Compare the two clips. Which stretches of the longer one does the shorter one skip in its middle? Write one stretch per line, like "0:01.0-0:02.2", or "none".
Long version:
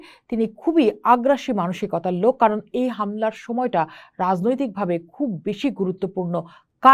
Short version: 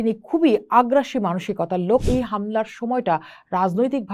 0:02.4-0:02.7